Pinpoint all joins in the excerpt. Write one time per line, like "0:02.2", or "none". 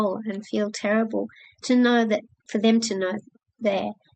0:02.4